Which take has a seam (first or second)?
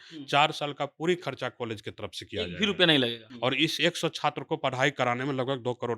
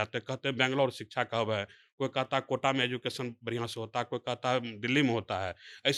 first